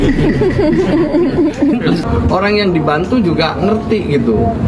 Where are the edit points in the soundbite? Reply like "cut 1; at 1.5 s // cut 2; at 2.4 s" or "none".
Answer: cut 1; at 2.0 s

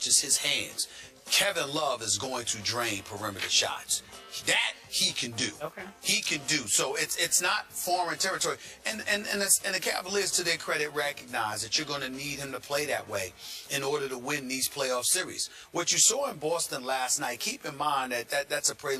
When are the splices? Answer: cut 1; at 15.7 s

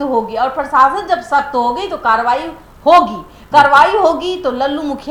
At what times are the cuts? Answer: none

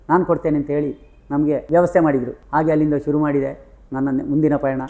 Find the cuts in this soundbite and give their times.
cut 1; at 1.6 s // cut 2; at 2.4 s

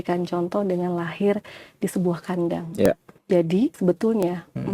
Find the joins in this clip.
cut 1; at 2.9 s // cut 2; at 3.8 s

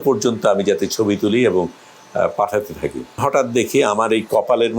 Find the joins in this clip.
cut 1; at 3.2 s

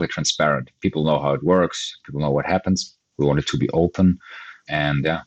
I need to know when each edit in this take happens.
cut 1; at 3.0 s

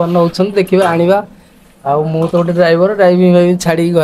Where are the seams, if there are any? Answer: none

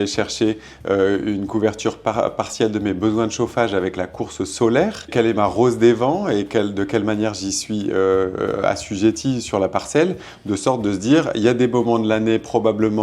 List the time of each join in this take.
cut 1; at 5.1 s

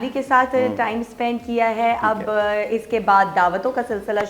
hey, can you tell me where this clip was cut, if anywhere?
none

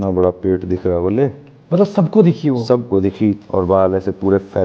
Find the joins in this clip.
cut 1; at 3.4 s

